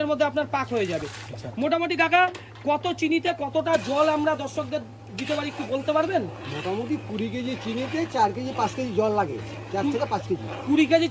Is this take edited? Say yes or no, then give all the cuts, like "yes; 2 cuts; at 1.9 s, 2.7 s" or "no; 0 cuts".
no; 0 cuts